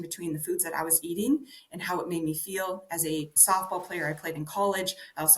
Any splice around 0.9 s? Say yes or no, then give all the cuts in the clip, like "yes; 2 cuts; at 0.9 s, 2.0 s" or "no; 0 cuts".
no; 1 cut; at 3.3 s